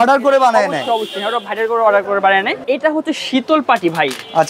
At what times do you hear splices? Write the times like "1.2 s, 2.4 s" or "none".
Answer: 2.6 s